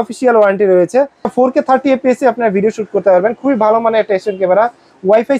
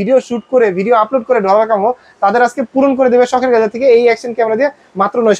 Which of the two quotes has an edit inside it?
first; 1 cut; at 1.3 s

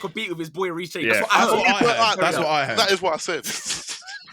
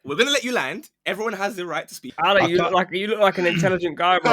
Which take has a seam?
second; 1 cut; at 1.9 s

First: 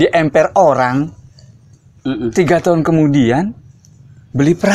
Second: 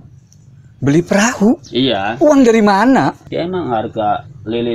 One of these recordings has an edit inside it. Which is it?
second; 1 cut; at 3.2 s

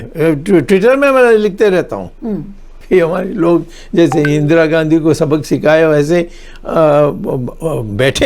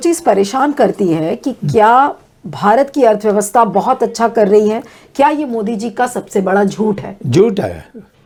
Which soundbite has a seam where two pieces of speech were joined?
first; 1 cut; at 2.7 s

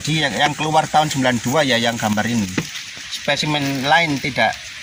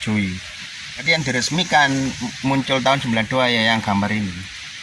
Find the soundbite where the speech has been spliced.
second; 1 cut; at 1.0 s

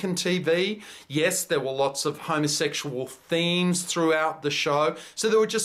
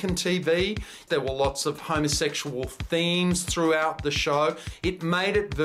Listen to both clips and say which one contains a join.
second; 2 cuts; at 1.0 s, 4.7 s

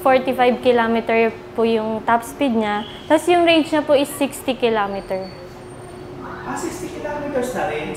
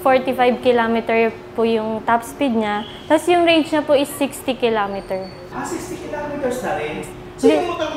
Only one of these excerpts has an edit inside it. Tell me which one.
second; 1 cut; at 5.4 s

